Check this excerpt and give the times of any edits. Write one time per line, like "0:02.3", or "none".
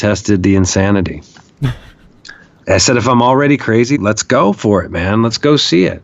0:02.6
0:04.0